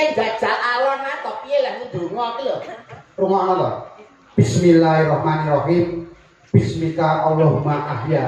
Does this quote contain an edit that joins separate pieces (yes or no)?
no